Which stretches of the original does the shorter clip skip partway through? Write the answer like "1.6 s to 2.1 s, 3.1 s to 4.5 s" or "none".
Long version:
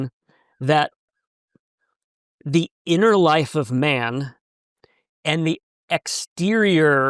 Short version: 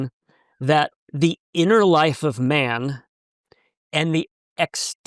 1.0 s to 2.3 s